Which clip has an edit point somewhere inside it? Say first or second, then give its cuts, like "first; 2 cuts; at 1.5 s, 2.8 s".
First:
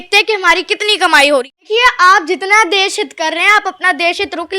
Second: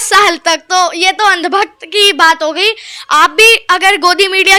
first; 1 cut; at 1.5 s